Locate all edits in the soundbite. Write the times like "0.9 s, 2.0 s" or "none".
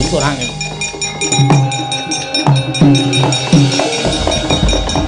1.3 s